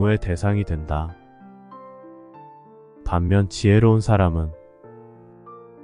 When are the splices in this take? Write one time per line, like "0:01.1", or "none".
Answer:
0:01.1
0:02.8